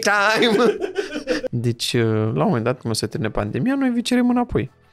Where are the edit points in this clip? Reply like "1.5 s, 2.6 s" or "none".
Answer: 1.4 s